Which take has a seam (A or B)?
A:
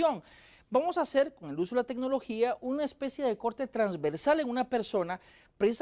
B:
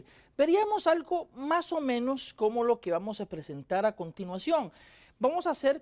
B